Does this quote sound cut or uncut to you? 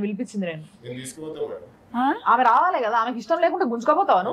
uncut